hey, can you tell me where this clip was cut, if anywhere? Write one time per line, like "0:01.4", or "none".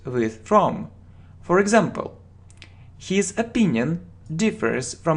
0:03.4

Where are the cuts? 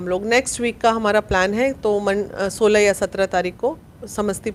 none

